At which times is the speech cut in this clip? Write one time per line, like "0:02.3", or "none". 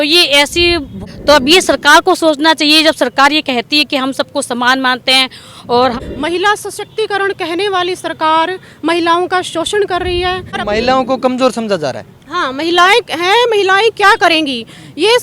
0:00.9
0:06.0
0:10.6